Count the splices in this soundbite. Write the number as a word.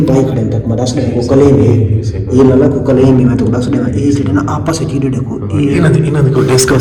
zero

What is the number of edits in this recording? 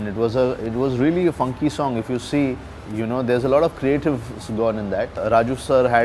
one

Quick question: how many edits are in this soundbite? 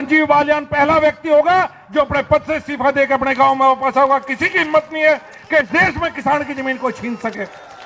zero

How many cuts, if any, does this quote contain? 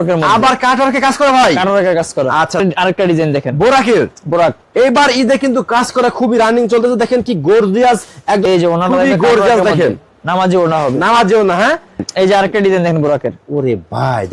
three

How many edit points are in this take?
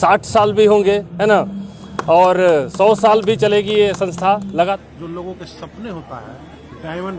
one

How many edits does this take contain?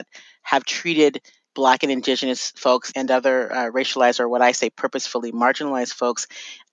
one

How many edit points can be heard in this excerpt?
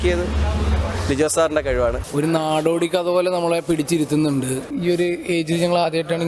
two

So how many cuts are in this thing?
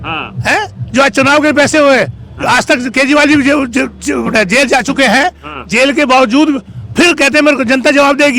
zero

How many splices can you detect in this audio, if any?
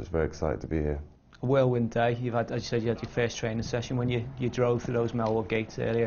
zero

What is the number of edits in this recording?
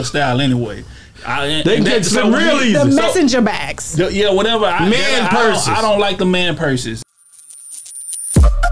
one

